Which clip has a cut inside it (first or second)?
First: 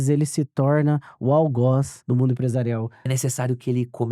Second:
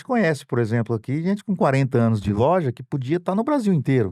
first